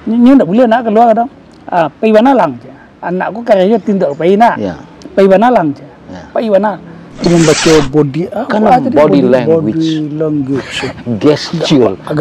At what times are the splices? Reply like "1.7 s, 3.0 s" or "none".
7.3 s